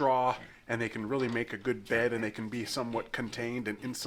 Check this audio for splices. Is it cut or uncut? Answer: uncut